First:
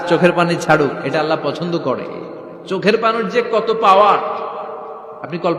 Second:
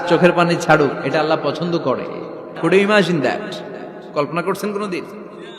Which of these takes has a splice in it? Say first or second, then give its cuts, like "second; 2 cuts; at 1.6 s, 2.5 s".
second; 1 cut; at 2.5 s